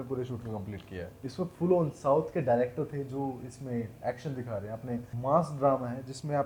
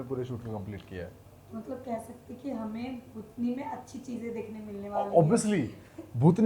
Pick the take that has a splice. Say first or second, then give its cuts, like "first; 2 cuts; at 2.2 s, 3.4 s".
first; 2 cuts; at 1.1 s, 5.1 s